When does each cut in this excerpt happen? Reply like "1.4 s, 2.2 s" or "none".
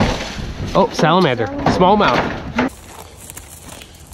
2.7 s